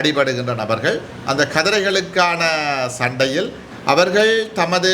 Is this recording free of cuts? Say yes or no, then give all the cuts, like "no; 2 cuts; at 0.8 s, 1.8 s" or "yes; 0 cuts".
no; 1 cut; at 3.6 s